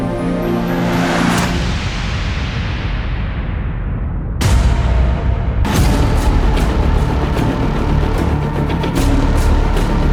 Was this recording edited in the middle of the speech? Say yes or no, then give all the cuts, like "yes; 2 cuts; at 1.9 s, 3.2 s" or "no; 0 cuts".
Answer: no; 0 cuts